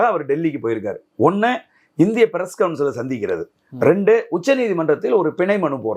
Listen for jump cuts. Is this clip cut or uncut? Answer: uncut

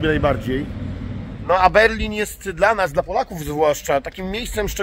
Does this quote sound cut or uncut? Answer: cut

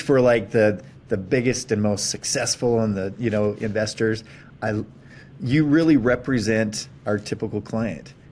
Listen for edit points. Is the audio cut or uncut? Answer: uncut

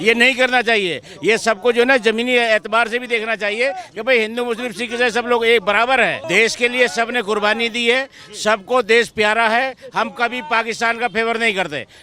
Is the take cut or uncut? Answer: cut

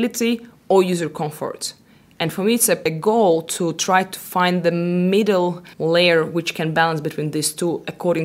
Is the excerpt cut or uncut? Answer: cut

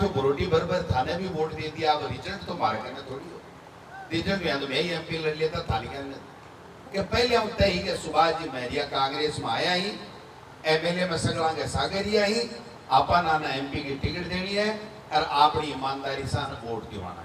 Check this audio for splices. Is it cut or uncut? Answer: cut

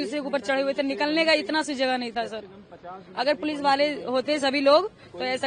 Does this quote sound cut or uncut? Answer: uncut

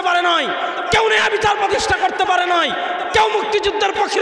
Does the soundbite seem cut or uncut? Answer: uncut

